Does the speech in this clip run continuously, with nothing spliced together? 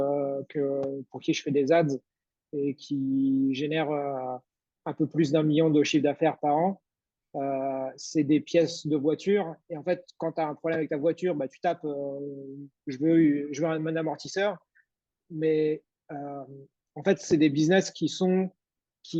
yes; 0 cuts

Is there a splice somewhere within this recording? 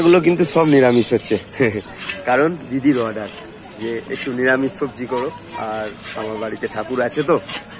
no; 0 cuts

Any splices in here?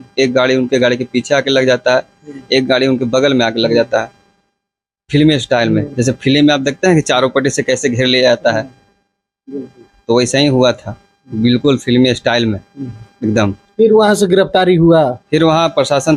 no; 0 cuts

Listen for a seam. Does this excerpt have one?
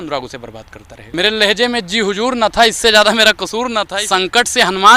yes; 2 cuts; at 1.1 s, 3.9 s

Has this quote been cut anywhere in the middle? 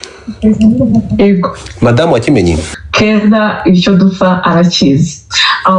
yes; 1 cut; at 2.7 s

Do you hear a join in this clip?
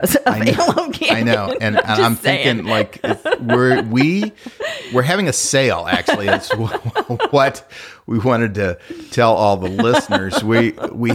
no; 0 cuts

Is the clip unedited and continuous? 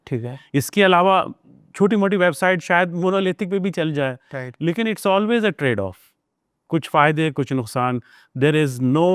yes; 0 cuts

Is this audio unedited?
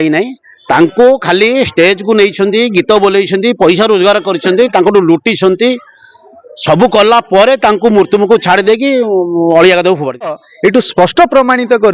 no; 1 cut; at 10.4 s

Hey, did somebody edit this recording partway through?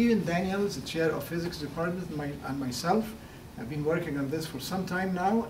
no; 0 cuts

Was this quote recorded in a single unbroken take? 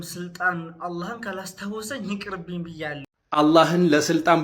no; 1 cut; at 3.0 s

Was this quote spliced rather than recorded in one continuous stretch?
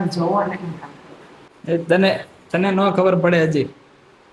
no; 0 cuts

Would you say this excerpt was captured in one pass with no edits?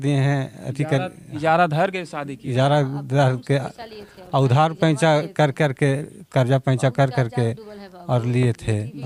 yes; 0 cuts

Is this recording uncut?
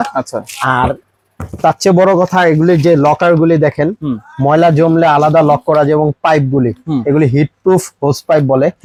yes; 0 cuts

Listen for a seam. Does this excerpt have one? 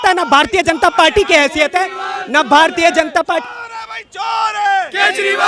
no; 0 cuts

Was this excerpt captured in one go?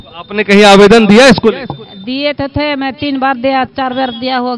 yes; 0 cuts

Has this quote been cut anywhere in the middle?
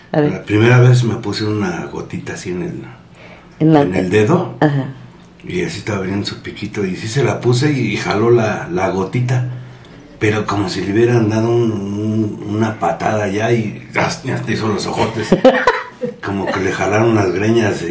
no; 0 cuts

